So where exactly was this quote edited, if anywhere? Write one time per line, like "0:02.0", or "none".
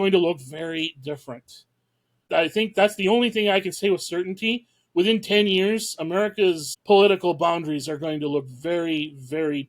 0:02.3

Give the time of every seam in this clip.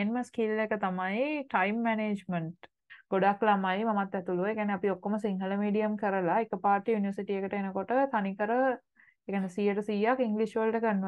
0:02.9

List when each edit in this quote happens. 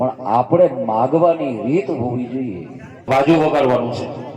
0:03.1

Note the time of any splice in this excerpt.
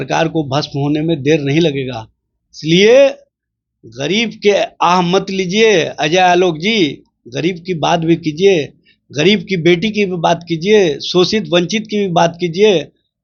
none

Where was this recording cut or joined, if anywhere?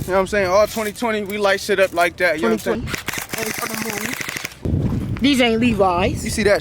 0:02.8
0:04.7

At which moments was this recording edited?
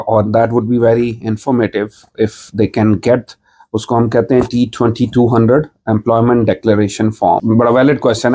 0:07.4

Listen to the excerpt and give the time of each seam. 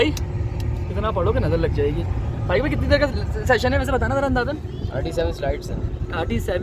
none

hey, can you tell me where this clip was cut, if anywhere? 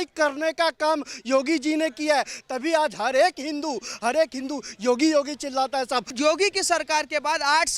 0:06.1

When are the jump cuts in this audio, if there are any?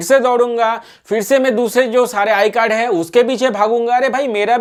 none

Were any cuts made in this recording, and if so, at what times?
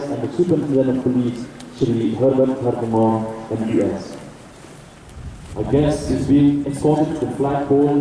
none

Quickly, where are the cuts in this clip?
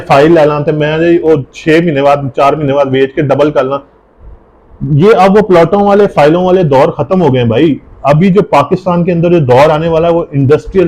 none

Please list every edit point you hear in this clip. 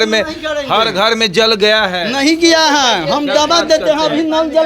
none

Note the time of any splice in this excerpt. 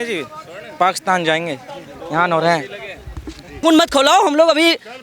0:03.6

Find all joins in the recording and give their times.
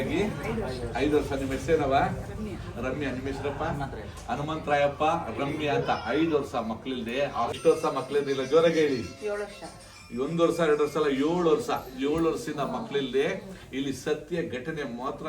0:07.6

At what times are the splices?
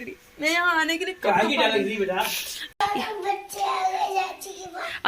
0:02.8

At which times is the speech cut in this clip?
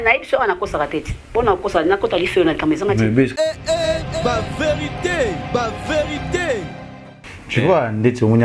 none

